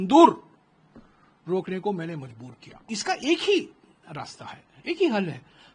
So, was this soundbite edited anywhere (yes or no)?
yes